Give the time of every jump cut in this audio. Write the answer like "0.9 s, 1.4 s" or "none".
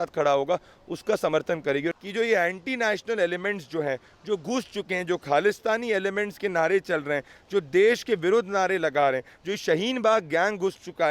2.0 s